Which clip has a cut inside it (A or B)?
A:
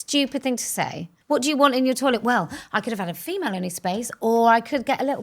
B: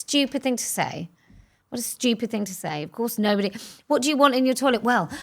A